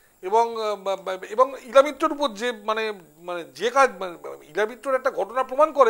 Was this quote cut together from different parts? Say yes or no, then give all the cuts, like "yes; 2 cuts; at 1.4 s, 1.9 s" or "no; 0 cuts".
no; 0 cuts